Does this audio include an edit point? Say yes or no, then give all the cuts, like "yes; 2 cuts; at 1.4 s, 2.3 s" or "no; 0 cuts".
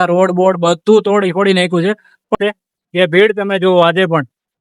yes; 1 cut; at 2.4 s